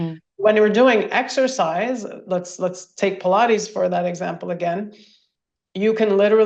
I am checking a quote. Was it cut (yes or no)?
no